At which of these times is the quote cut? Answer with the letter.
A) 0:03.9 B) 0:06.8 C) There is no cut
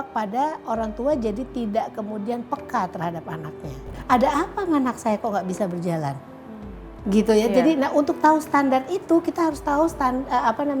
A